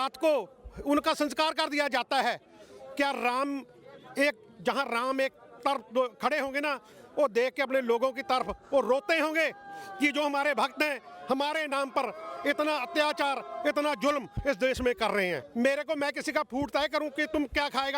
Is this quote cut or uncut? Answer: cut